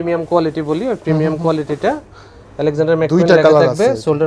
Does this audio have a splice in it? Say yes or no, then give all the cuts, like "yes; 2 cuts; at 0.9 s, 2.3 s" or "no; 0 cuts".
no; 0 cuts